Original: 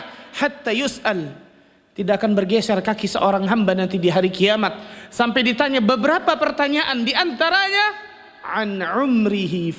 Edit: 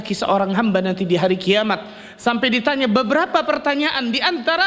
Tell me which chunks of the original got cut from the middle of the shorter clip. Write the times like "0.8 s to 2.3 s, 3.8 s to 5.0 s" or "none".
none